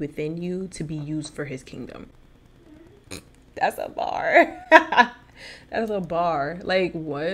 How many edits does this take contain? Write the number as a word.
one